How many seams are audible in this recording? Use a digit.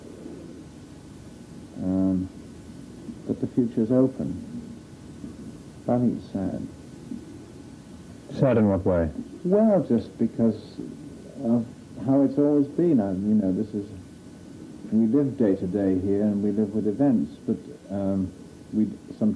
0